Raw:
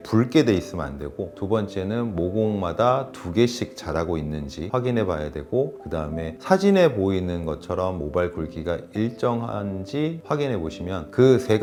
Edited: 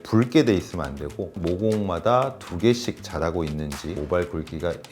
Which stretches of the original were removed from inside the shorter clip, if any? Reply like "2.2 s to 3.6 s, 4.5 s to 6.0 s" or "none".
1.4 s to 2.1 s, 4.7 s to 8.0 s